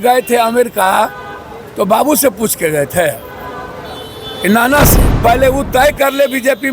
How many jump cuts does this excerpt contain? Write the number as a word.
one